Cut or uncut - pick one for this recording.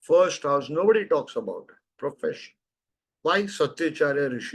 uncut